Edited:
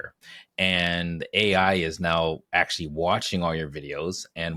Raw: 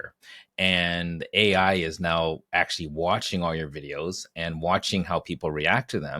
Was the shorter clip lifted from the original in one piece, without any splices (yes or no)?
yes